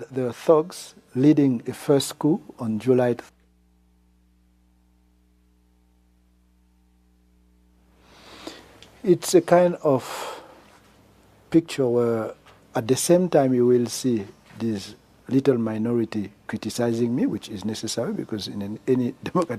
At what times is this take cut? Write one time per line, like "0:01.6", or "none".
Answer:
none